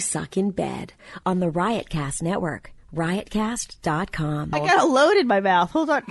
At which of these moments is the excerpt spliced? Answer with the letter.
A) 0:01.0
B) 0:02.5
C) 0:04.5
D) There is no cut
C